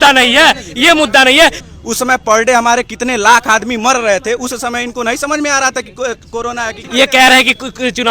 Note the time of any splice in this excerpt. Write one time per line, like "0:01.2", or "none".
0:01.6
0:06.8